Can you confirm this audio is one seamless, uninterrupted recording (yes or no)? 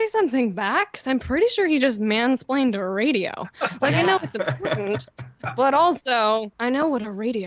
yes